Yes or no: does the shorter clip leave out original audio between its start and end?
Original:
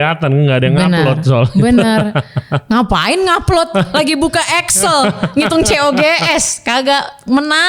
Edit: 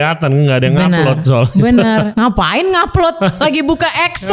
yes